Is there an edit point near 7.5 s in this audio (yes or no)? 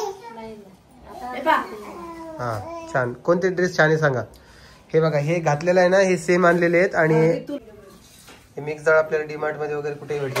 yes